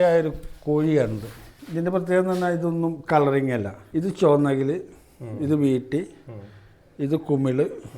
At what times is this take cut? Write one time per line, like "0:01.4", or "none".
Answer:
0:01.5
0:03.8